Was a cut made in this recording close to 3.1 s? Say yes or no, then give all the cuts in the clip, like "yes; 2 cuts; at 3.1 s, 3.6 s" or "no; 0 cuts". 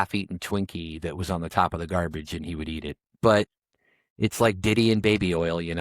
yes; 1 cut; at 3.1 s